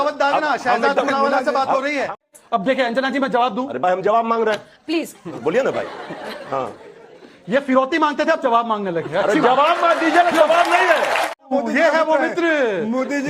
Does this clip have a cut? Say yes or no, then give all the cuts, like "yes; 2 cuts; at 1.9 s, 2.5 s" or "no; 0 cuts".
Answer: yes; 2 cuts; at 2.2 s, 11.4 s